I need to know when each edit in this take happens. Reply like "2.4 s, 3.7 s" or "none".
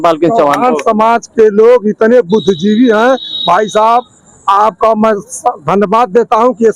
none